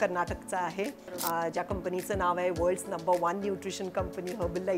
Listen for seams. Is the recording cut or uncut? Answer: cut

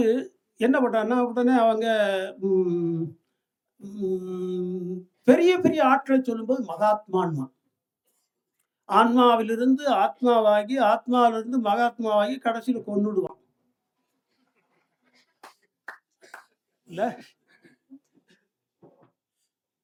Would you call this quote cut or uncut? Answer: uncut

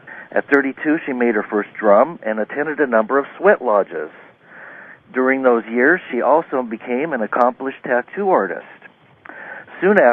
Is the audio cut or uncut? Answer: uncut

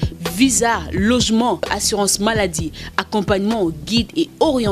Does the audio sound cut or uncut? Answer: uncut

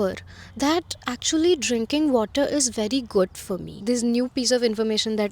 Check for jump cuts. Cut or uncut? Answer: cut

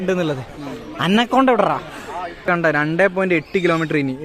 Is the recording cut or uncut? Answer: cut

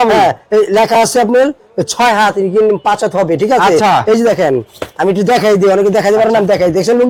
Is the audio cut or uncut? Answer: uncut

